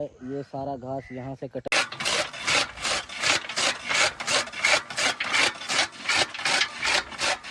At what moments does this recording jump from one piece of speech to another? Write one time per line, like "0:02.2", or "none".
0:01.7